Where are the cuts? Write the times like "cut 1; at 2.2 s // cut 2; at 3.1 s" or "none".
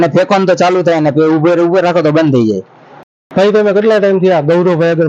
cut 1; at 3.0 s